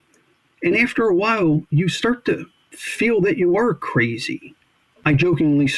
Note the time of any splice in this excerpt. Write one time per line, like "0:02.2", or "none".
0:04.9